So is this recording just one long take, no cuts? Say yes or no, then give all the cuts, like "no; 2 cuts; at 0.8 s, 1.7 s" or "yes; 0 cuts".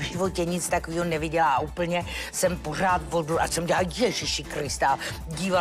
yes; 0 cuts